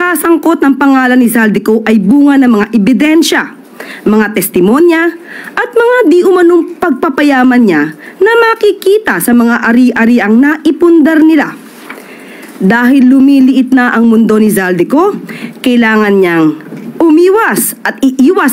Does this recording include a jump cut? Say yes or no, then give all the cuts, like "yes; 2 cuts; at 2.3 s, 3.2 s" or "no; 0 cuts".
no; 0 cuts